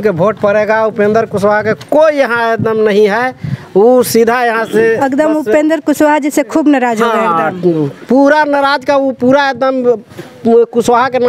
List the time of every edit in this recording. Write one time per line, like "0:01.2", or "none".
none